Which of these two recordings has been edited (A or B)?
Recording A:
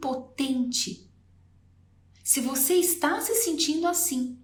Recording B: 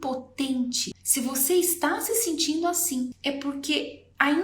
B